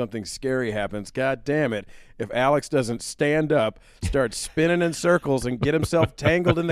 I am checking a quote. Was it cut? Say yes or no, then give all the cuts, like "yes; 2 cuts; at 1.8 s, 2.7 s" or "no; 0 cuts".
no; 0 cuts